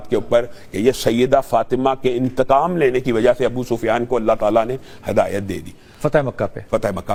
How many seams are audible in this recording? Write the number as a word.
zero